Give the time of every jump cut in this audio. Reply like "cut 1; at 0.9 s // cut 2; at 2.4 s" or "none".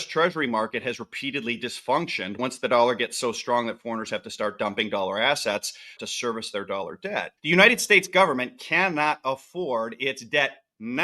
cut 1; at 2.4 s // cut 2; at 6.0 s // cut 3; at 7.3 s